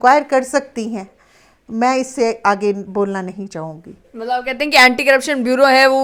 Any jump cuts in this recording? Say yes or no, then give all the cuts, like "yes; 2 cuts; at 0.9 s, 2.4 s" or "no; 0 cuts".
no; 0 cuts